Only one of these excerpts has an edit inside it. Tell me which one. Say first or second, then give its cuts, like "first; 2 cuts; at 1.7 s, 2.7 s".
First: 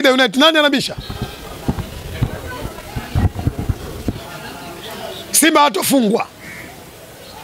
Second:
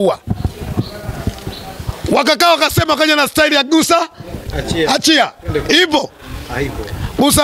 first; 1 cut; at 4.3 s